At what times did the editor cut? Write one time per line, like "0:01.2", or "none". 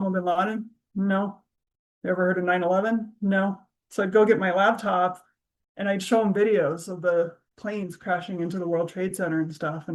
none